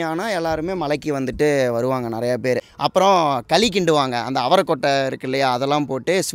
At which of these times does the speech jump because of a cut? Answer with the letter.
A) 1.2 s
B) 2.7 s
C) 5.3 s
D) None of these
B